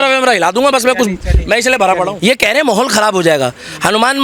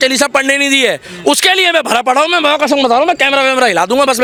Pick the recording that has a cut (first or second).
first